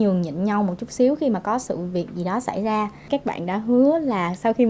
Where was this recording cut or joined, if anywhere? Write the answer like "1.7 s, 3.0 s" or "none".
3.1 s